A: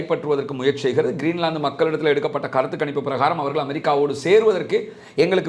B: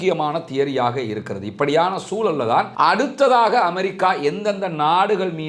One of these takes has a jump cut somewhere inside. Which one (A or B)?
B